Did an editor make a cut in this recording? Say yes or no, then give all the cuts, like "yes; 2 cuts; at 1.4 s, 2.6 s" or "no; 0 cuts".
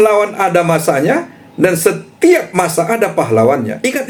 no; 0 cuts